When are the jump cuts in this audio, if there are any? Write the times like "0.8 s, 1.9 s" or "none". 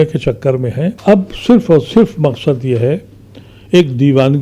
1.0 s